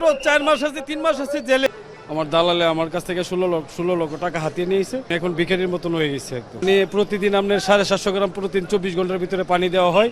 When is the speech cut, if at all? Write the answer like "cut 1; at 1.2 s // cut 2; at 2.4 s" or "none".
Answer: cut 1; at 1.7 s // cut 2; at 5.1 s // cut 3; at 6.6 s